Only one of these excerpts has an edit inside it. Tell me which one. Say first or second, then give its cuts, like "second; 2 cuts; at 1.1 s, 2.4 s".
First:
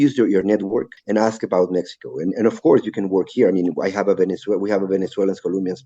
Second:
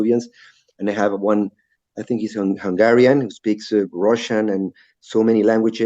first; 1 cut; at 0.9 s